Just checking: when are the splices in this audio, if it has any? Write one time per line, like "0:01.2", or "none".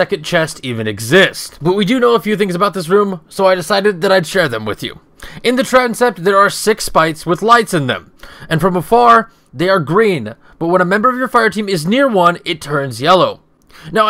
0:07.0